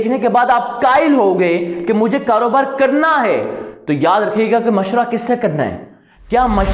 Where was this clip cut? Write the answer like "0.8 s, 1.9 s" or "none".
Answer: none